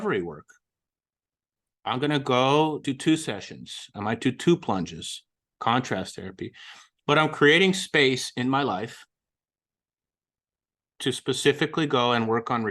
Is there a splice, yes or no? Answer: yes